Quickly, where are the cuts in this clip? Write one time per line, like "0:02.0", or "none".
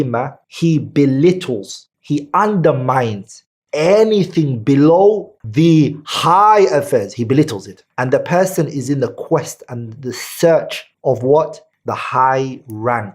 0:05.4
0:07.8